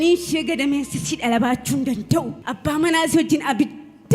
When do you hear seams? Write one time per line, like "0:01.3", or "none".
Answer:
0:02.4